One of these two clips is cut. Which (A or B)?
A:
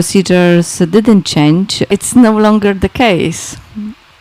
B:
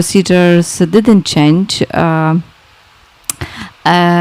A